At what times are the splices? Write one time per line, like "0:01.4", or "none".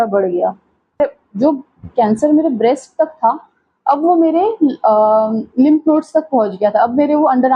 0:01.0